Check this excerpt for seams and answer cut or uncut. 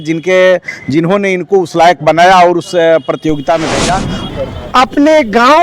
cut